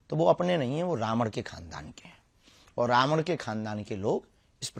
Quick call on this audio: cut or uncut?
uncut